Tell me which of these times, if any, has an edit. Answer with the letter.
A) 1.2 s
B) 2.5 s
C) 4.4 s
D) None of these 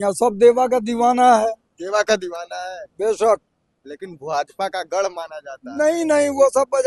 D